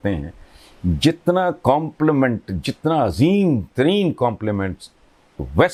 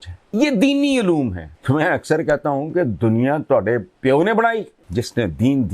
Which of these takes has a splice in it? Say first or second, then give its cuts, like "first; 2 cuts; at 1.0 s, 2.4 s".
second; 2 cuts; at 1.5 s, 4.8 s